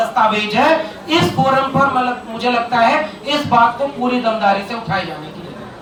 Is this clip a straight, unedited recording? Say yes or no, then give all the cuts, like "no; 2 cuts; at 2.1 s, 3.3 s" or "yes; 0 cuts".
yes; 0 cuts